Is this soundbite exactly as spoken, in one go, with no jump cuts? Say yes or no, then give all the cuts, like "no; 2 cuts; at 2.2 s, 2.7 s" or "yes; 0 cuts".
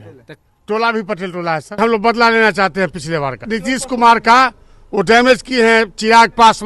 no; 2 cuts; at 1.8 s, 3.4 s